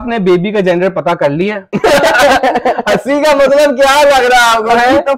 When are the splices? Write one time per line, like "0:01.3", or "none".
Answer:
none